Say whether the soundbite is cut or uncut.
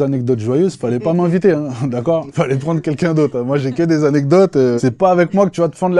cut